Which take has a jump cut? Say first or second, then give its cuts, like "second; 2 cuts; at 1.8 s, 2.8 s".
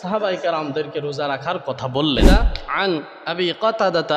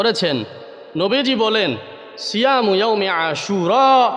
first; 1 cut; at 2.2 s